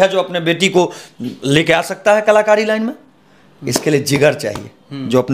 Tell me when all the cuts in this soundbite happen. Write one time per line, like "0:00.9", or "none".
none